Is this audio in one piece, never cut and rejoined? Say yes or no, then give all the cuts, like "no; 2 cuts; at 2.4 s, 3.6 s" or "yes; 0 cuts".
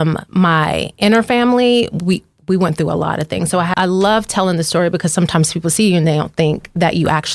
no; 1 cut; at 3.7 s